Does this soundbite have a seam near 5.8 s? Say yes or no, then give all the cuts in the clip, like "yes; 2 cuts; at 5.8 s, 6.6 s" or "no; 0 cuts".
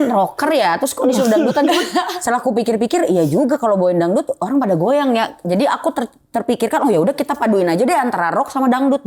no; 0 cuts